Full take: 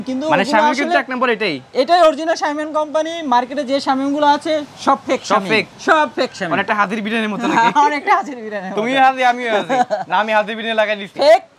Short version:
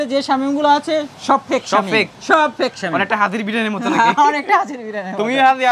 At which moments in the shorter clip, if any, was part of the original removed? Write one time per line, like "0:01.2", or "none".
none